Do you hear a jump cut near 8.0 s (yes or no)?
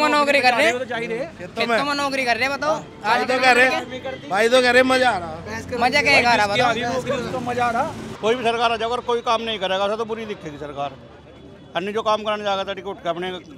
yes